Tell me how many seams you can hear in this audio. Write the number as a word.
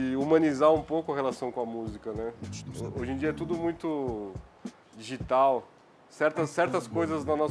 zero